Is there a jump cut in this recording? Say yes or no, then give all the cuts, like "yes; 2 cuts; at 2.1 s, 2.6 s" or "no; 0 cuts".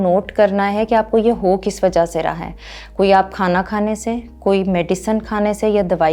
no; 0 cuts